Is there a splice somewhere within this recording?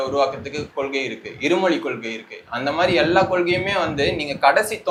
no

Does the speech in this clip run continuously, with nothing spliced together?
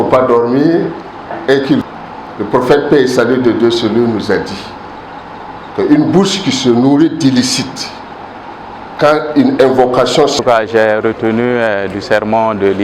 no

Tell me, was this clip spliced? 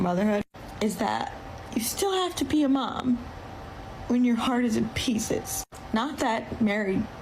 yes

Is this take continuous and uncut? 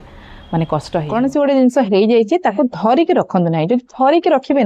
no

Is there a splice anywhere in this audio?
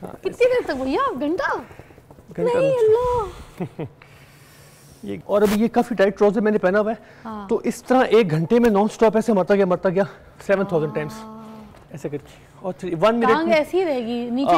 yes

